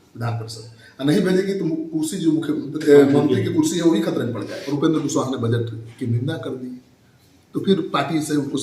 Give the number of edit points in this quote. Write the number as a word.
one